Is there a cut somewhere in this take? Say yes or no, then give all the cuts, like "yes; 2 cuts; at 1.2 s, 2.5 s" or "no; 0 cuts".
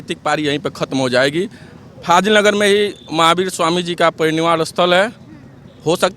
no; 0 cuts